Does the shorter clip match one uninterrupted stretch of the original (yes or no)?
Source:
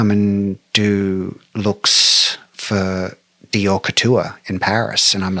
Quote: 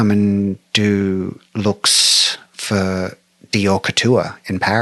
yes